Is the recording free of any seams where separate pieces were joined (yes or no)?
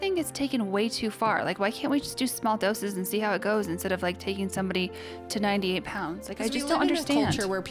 yes